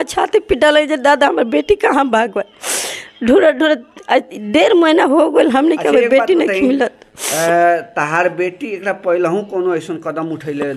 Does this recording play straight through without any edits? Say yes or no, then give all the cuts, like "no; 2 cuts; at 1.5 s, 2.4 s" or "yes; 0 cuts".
yes; 0 cuts